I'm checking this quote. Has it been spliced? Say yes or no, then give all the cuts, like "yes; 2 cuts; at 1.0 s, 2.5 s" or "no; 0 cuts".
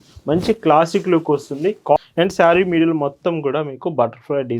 yes; 1 cut; at 2.0 s